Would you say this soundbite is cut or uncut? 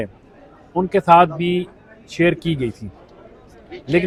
uncut